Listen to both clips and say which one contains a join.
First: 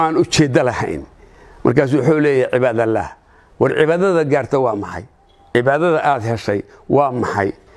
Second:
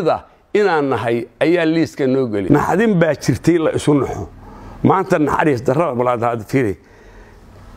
second; 1 cut; at 2.4 s

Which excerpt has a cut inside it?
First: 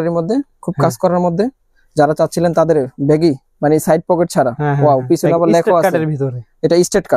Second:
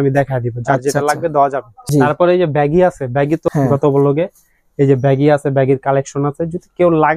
second; 2 cuts; at 1.7 s, 3.4 s

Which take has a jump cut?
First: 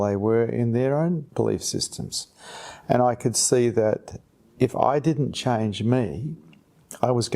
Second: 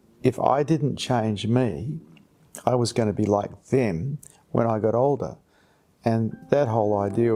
first; 1 cut; at 1.3 s

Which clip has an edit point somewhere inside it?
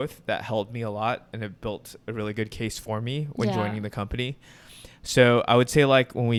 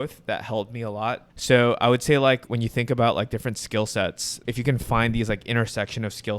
second; 3 cuts; at 1.3 s, 2.5 s, 4.4 s

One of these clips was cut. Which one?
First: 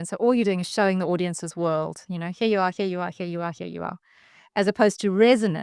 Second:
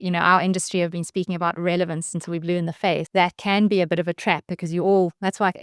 second; 1 cut; at 3.1 s

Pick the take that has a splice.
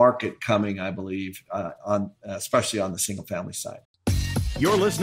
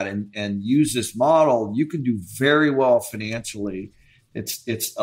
first; 1 cut; at 3.8 s

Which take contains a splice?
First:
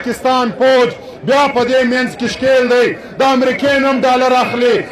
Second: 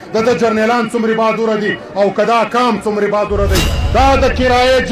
second; 1 cut; at 3.7 s

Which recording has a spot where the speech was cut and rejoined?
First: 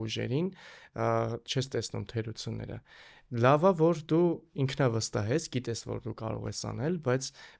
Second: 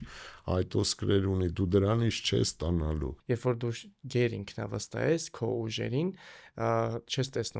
second; 1 cut; at 3.1 s

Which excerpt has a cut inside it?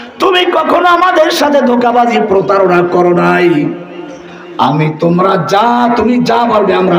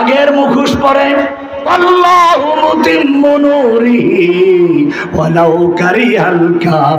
second; 1 cut; at 1.6 s

